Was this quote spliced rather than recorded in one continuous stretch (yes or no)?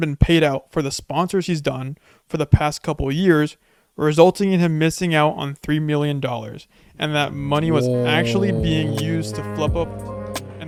no